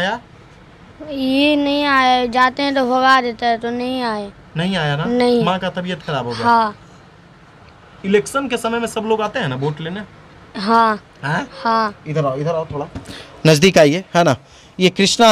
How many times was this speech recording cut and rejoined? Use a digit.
0